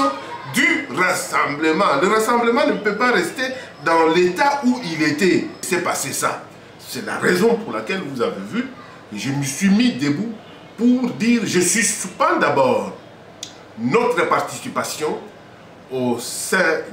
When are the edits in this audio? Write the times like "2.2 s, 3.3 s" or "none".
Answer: 5.6 s